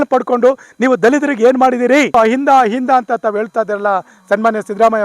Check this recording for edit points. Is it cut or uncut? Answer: cut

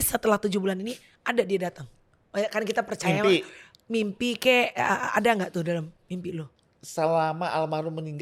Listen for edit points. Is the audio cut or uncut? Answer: uncut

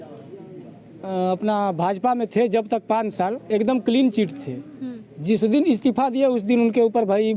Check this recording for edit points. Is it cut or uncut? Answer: uncut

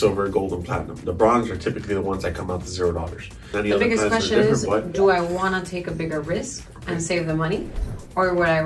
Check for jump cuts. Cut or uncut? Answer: cut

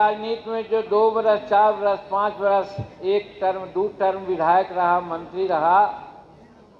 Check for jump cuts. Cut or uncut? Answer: uncut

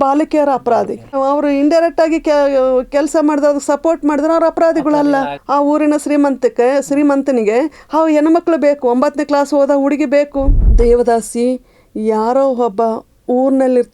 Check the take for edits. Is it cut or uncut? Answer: cut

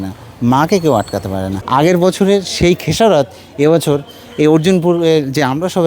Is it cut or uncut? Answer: cut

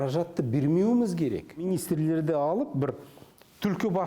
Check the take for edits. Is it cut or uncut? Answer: cut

